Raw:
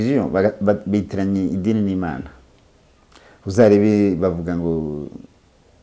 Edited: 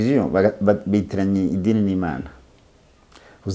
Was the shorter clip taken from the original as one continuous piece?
yes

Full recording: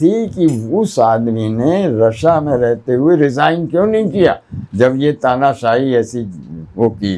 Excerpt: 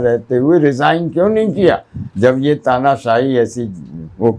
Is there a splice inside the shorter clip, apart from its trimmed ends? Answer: no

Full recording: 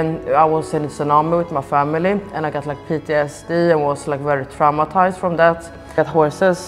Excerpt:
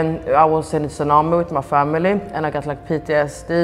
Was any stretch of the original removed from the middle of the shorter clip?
no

